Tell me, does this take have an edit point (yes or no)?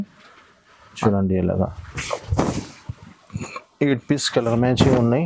yes